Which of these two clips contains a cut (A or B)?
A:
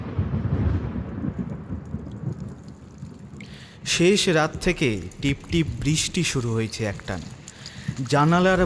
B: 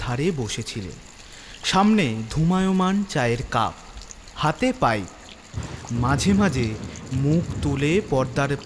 A